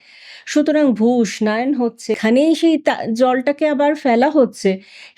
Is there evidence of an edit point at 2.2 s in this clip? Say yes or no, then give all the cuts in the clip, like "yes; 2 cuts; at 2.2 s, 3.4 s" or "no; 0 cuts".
yes; 1 cut; at 2.2 s